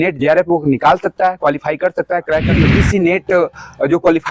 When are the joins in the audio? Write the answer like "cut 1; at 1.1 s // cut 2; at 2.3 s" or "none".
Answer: cut 1; at 2.5 s